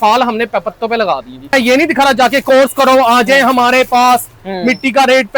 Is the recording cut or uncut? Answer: cut